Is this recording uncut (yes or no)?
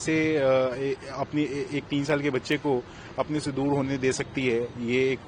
yes